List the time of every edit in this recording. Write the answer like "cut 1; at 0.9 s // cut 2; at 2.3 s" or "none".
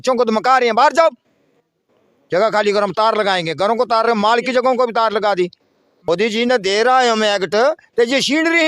cut 1; at 5.9 s

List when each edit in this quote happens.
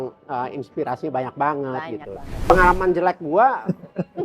cut 1; at 2.5 s

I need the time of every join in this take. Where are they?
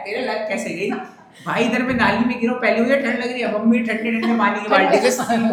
none

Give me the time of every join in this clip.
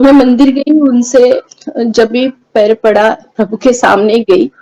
cut 1; at 1.6 s

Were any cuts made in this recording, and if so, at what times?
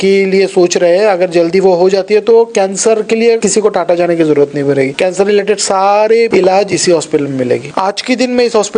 cut 1; at 3.4 s // cut 2; at 4.9 s // cut 3; at 6.3 s // cut 4; at 7.7 s

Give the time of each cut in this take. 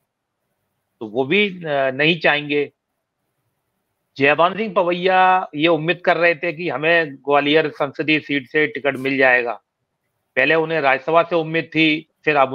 none

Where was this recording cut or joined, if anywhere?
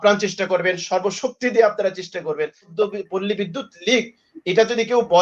cut 1; at 2.7 s

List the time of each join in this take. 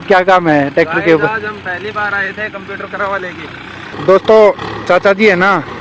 cut 1; at 3.9 s

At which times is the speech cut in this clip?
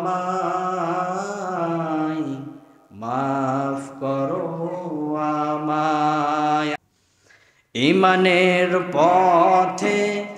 cut 1; at 6.8 s

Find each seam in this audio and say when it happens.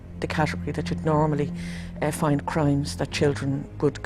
none

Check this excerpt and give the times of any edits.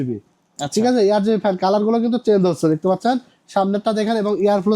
none

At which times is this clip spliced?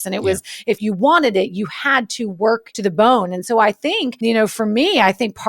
cut 1; at 2.7 s // cut 2; at 4.1 s

